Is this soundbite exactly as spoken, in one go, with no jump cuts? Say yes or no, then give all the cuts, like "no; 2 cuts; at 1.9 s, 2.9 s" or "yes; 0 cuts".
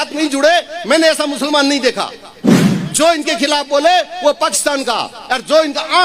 no; 1 cut; at 2.5 s